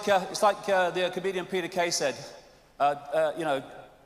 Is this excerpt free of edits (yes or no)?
no